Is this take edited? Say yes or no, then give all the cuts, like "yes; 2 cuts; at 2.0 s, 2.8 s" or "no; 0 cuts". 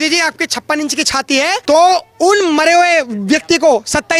yes; 1 cut; at 1.6 s